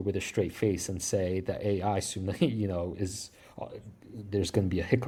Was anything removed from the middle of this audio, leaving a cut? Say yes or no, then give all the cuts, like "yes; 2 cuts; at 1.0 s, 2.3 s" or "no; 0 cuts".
no; 0 cuts